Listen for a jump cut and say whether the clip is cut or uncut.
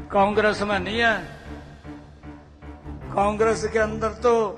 cut